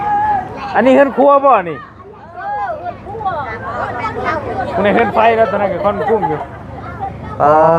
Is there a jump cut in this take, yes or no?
no